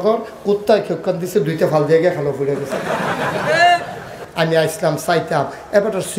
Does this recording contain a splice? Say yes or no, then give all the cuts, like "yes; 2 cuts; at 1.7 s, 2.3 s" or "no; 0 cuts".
yes; 1 cut; at 4.2 s